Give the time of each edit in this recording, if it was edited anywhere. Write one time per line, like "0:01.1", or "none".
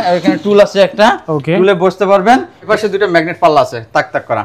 0:02.6